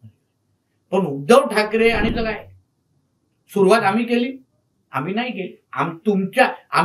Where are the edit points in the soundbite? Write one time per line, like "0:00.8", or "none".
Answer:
0:02.1